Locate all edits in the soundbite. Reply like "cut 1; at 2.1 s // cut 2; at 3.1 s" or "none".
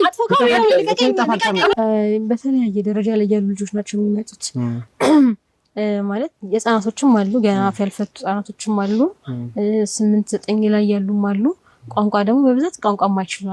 cut 1; at 1.7 s